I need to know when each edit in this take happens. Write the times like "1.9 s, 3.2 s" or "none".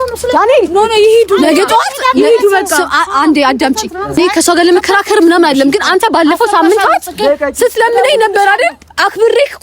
4.2 s